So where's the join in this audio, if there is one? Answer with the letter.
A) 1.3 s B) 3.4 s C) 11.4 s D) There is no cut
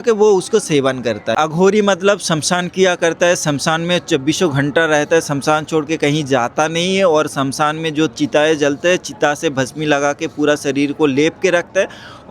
A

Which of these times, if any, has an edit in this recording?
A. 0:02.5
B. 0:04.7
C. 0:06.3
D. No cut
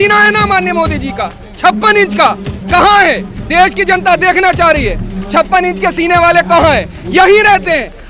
D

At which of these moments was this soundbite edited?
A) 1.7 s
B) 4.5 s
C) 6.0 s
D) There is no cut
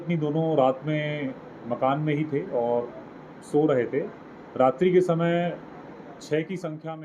D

